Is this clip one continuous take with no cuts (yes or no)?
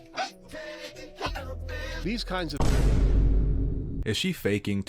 no